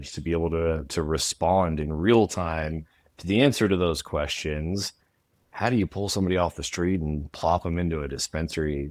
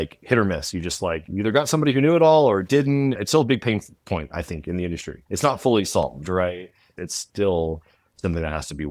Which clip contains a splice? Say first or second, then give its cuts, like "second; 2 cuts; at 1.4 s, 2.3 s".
second; 2 cuts; at 3.2 s, 5.2 s